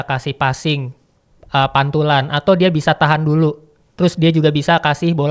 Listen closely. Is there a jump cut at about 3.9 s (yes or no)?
no